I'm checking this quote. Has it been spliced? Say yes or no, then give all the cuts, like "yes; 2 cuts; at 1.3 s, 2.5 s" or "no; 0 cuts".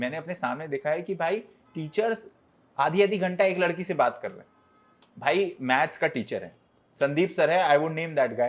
no; 0 cuts